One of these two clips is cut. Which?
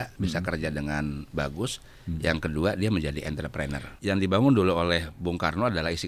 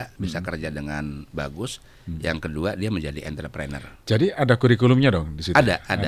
first; 1 cut; at 3.9 s

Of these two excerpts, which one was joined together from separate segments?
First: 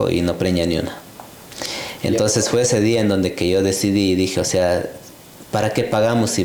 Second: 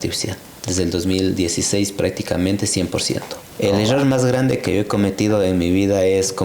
second; 1 cut; at 3.4 s

